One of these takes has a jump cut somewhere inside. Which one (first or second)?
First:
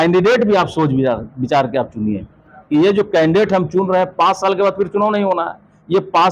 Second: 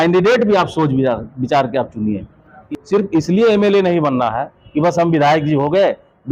second